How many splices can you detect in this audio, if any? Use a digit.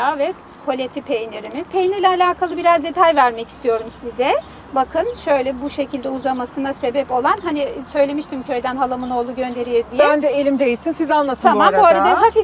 0